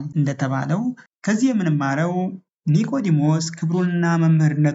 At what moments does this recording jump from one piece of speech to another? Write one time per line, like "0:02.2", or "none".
0:01.0

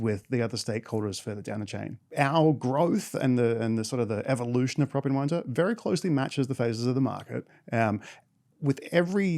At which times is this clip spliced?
0:02.0

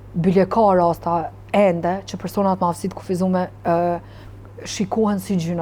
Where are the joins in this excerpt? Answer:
none

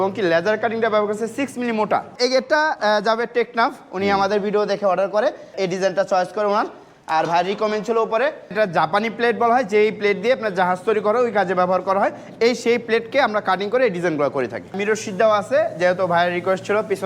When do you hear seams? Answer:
0:02.1
0:05.5
0:08.5
0:14.8

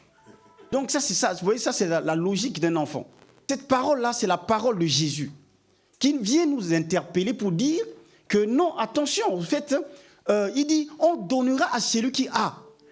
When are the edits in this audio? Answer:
0:00.7
0:03.4

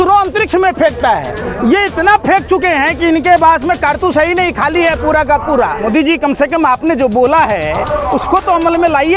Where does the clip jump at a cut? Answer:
0:05.8

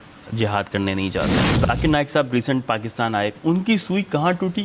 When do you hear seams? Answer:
0:01.4
0:03.4

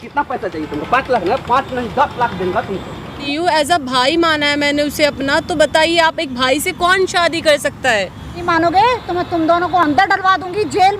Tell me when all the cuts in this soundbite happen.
0:03.2
0:08.4

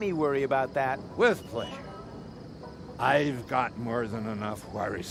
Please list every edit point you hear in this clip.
none

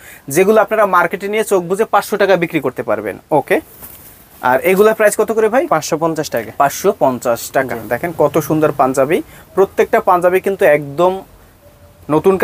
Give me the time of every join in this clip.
none

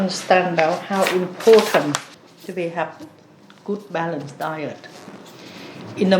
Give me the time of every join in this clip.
0:02.1

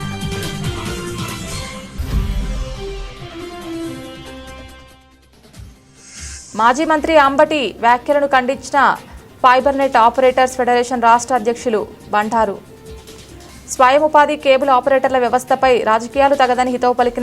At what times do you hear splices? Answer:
0:02.0
0:06.5

